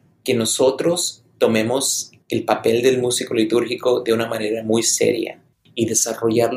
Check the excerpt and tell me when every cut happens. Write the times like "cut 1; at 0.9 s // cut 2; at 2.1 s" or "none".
cut 1; at 5.6 s